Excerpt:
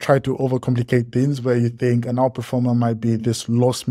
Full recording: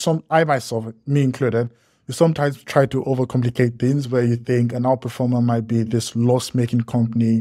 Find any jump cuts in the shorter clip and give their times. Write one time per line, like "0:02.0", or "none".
none